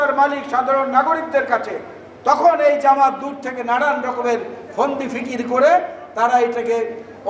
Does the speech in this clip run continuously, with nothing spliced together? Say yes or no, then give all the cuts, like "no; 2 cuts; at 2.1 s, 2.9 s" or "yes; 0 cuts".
yes; 0 cuts